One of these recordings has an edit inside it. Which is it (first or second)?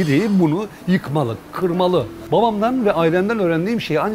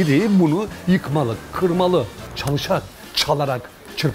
second